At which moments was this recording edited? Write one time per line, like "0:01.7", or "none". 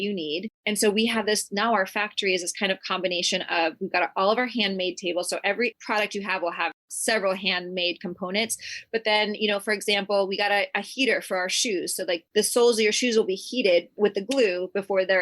0:06.9
0:12.2